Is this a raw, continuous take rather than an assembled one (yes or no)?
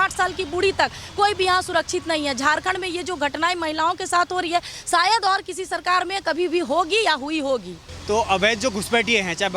yes